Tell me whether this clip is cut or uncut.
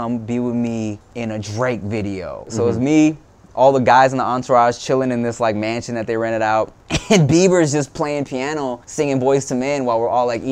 cut